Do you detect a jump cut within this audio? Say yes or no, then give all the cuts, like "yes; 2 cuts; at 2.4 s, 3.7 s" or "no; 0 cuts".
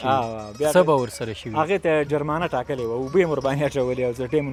no; 0 cuts